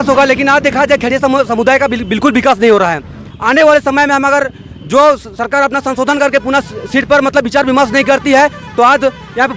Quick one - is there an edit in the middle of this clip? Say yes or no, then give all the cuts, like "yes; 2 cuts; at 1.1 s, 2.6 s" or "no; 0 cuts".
yes; 1 cut; at 3.3 s